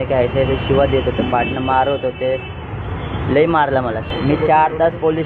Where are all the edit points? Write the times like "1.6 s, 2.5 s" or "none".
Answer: 4.1 s